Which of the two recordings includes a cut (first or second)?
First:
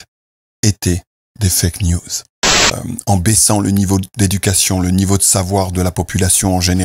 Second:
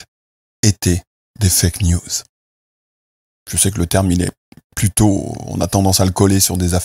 first